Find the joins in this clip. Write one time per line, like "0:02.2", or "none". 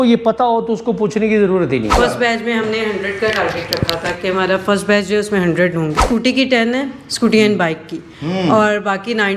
0:01.9
0:06.0